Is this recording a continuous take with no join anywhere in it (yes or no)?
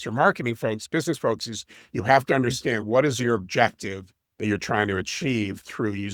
yes